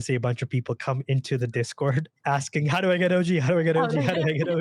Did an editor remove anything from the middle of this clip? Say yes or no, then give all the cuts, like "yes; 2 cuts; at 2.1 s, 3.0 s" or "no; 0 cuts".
yes; 1 cut; at 2.1 s